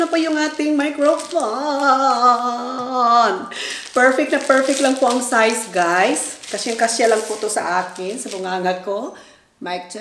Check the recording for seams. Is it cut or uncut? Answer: uncut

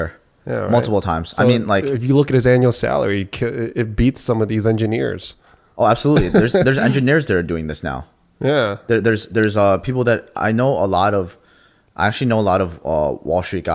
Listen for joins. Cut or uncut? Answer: uncut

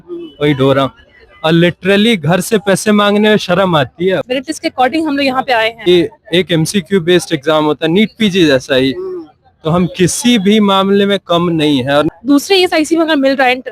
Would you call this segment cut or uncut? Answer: cut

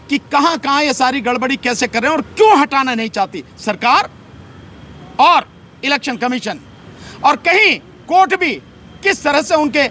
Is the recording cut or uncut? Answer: uncut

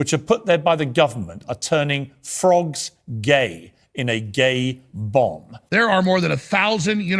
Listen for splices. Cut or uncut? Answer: cut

